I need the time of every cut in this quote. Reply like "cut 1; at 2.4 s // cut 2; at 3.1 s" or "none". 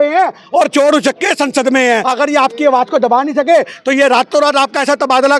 cut 1; at 2.0 s